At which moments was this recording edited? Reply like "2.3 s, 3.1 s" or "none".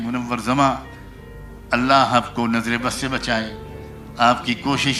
none